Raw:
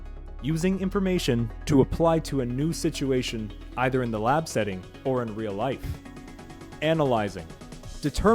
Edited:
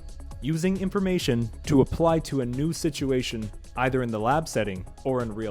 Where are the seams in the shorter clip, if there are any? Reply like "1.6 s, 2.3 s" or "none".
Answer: none